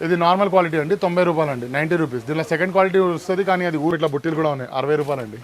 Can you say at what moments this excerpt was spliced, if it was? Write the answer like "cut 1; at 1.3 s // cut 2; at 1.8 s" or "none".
cut 1; at 3.9 s